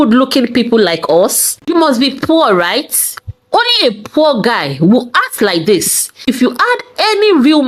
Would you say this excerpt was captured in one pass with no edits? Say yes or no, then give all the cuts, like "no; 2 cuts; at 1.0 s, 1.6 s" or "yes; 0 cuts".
no; 1 cut; at 1.6 s